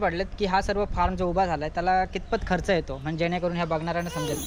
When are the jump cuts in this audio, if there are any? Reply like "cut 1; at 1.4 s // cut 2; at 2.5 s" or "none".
none

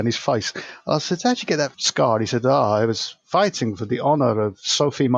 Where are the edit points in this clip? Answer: cut 1; at 1.8 s

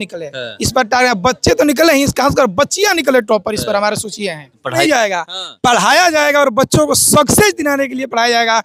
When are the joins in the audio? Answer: cut 1; at 4.8 s

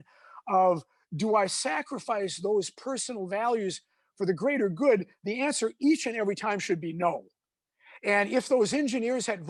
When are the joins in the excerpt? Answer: none

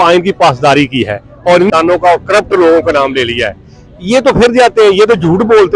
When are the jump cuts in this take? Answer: cut 1; at 1.7 s

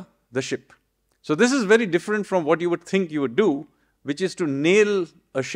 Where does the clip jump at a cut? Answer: none

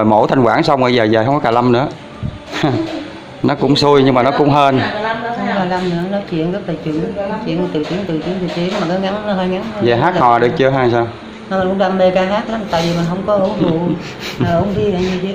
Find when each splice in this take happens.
none

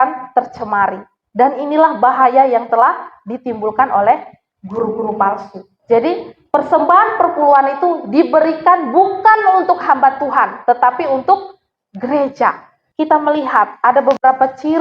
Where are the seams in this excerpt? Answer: cut 1; at 5.7 s // cut 2; at 12.8 s

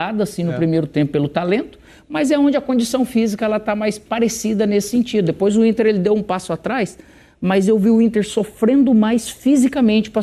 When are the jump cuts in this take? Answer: none

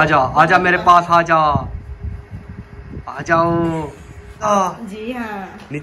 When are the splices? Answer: cut 1; at 4.4 s

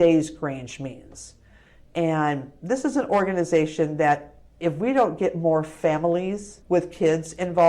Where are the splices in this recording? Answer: cut 1; at 6.5 s

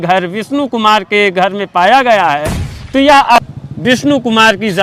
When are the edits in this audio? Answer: cut 1; at 3.3 s

